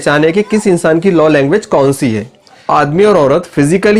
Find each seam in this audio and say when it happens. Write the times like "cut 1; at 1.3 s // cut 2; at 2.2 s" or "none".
cut 1; at 2.7 s